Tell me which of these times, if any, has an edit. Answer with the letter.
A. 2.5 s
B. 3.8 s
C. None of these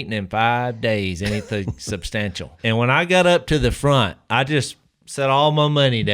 A